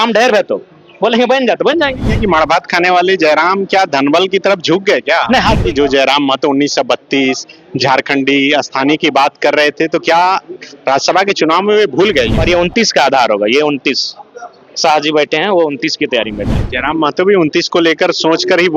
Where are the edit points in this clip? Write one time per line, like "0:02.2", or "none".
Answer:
0:02.1
0:05.6
0:12.4
0:16.5